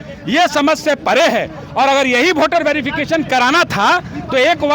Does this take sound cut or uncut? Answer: uncut